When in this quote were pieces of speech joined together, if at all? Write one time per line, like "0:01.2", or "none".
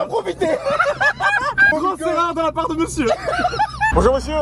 none